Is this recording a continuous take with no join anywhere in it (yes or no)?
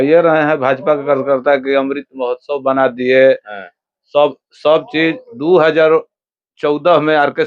yes